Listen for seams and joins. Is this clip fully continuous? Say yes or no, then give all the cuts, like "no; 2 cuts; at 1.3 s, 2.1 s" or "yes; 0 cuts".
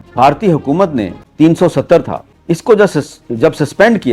no; 1 cut; at 2.3 s